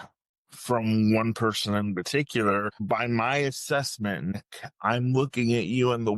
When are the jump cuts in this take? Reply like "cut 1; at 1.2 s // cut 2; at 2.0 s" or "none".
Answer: cut 1; at 2.8 s // cut 2; at 4.3 s